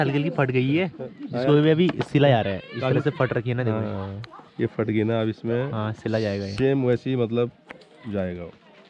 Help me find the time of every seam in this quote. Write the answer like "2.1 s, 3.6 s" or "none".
none